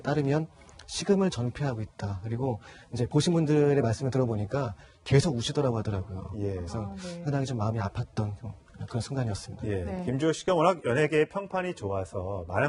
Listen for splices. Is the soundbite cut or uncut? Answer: uncut